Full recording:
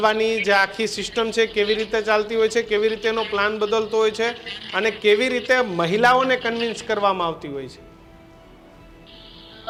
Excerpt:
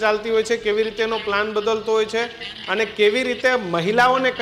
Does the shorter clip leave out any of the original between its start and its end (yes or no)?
no